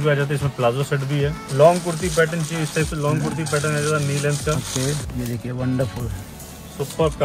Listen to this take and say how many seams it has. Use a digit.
2